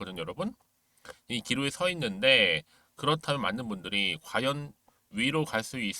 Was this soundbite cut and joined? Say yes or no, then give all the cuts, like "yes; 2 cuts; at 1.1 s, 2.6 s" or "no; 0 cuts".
no; 0 cuts